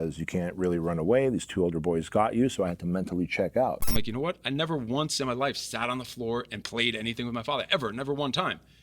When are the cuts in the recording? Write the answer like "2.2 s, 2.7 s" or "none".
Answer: 3.8 s